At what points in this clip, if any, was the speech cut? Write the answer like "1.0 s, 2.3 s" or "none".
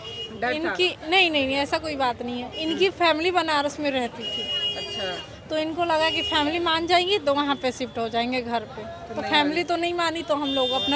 none